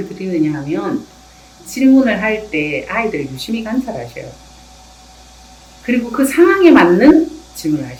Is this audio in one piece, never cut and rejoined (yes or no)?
yes